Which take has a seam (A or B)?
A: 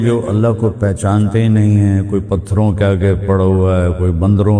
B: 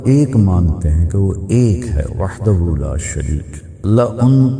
B